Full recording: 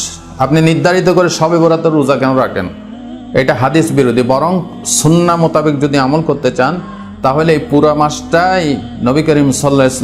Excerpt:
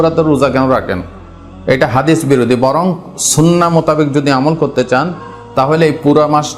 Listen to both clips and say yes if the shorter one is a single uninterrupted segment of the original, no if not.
yes